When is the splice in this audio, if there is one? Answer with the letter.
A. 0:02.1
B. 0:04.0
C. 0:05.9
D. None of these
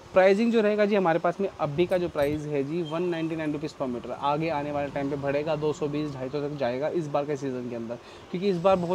D